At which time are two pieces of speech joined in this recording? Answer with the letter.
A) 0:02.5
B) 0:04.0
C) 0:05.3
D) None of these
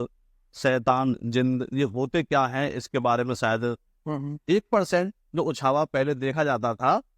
B